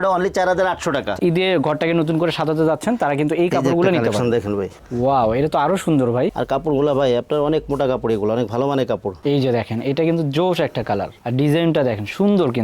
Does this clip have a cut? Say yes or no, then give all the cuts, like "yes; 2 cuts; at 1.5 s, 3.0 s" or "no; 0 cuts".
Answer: yes; 3 cuts; at 1.2 s, 6.3 s, 9.1 s